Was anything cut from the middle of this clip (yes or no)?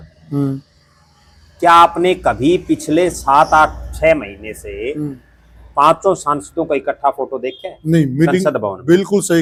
no